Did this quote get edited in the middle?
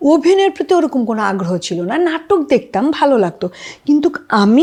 no; 0 cuts

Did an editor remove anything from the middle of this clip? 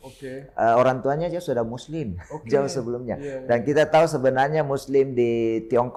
no; 0 cuts

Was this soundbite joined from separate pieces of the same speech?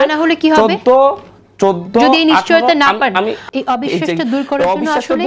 yes; 1 cut; at 3.4 s

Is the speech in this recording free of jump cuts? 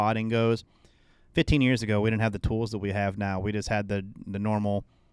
yes; 0 cuts

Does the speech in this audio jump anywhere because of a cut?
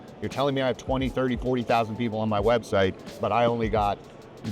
yes; 1 cut; at 3.1 s

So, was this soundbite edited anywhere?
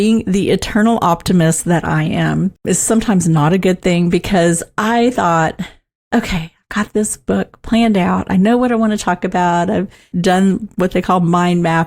yes; 1 cut; at 2.6 s

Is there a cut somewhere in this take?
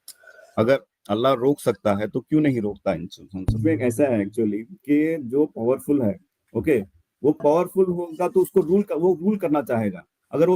yes; 1 cut; at 3.6 s

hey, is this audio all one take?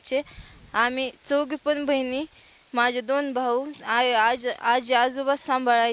yes; 0 cuts

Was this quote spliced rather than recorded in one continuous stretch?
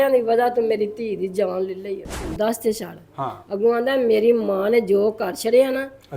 yes; 1 cut; at 2.3 s

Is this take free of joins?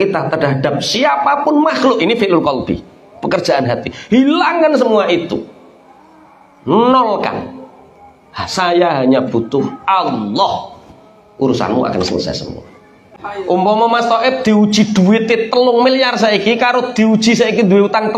no; 1 cut; at 13.2 s

